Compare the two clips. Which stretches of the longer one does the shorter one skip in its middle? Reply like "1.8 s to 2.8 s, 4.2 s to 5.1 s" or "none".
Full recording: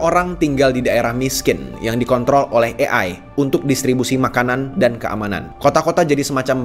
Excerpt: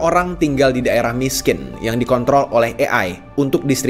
none